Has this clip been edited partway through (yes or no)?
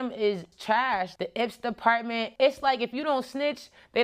yes